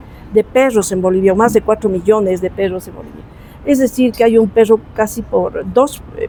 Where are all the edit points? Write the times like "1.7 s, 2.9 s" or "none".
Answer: none